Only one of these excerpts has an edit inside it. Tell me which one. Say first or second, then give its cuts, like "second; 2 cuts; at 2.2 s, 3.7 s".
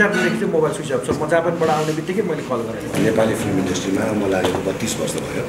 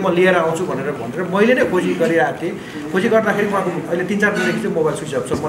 first; 1 cut; at 2.9 s